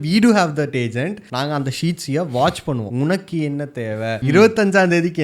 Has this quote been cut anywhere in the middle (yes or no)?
yes